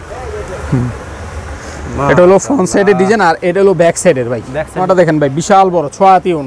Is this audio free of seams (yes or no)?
no